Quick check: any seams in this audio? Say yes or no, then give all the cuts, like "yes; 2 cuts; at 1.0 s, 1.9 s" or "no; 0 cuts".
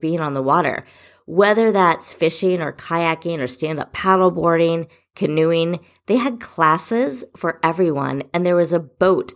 no; 0 cuts